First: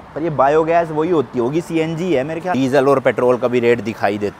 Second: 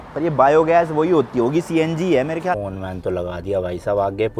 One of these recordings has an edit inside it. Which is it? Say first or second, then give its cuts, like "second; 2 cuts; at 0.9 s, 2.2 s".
second; 1 cut; at 2.5 s